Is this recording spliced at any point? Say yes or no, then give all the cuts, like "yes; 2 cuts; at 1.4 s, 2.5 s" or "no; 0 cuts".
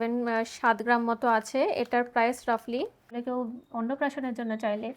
yes; 1 cut; at 3.2 s